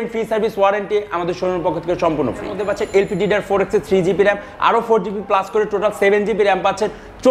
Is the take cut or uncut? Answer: cut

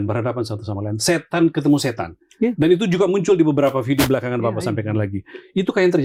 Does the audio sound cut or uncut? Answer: uncut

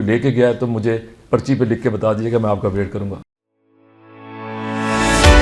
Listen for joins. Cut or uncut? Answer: cut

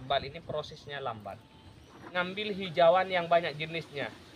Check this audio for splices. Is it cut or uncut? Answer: cut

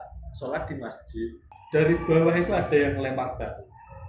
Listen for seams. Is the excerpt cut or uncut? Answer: cut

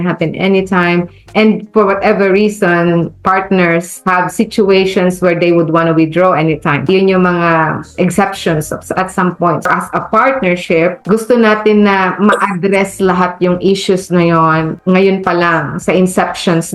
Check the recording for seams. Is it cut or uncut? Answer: cut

